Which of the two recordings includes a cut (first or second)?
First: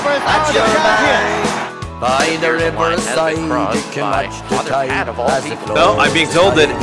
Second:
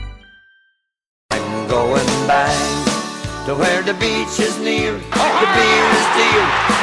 second